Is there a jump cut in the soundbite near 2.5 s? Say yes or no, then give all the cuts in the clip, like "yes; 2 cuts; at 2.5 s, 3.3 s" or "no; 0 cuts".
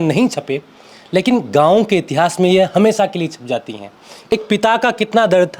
no; 1 cut; at 4.3 s